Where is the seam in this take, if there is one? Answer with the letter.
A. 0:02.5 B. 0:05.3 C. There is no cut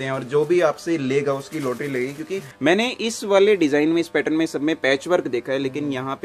A